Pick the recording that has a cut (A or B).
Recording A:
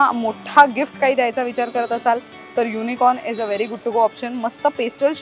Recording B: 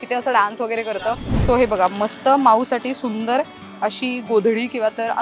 B